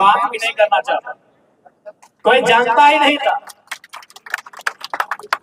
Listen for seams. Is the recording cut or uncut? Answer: uncut